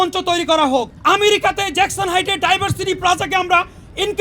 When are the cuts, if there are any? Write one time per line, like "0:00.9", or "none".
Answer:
0:00.9

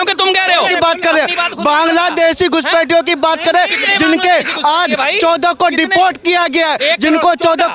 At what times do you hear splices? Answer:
none

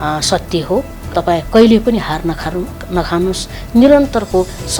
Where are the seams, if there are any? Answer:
0:01.1

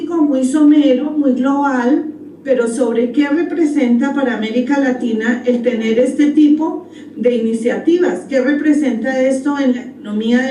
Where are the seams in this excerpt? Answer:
none

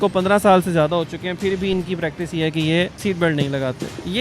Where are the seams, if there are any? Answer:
0:02.9

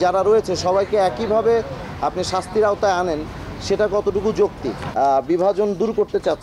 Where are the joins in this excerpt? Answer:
0:04.8

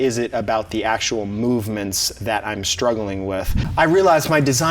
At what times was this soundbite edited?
0:03.6

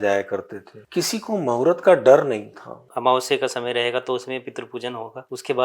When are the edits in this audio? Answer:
0:02.8

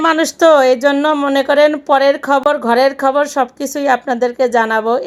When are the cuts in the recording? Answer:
none

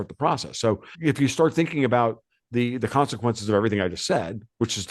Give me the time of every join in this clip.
0:00.9

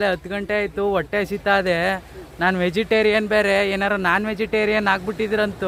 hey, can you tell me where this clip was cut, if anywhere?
none

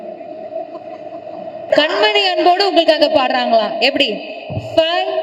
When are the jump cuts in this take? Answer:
0:01.7

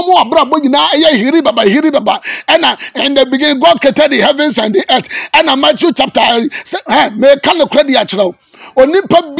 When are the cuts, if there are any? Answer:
none

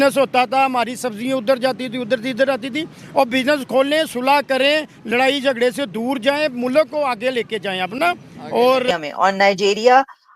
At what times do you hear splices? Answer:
0:08.9

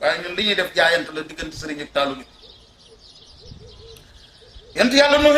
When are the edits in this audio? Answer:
0:02.8
0:04.5

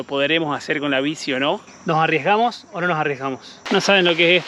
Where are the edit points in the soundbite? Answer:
0:01.7
0:03.5

